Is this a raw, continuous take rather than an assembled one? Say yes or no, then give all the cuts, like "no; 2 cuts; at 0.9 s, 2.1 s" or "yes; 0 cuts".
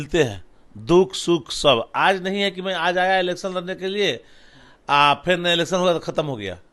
yes; 0 cuts